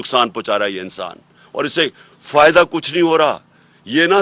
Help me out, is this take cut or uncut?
uncut